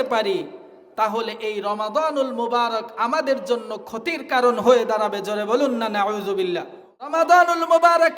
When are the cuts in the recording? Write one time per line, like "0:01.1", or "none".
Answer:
0:07.1